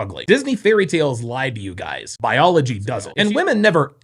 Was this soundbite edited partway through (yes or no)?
yes